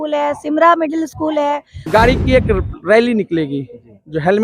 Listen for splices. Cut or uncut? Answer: cut